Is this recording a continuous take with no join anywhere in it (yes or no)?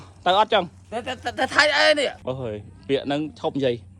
no